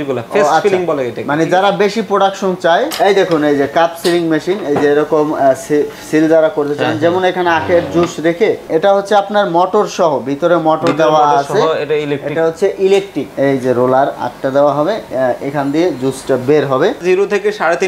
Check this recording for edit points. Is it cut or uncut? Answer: cut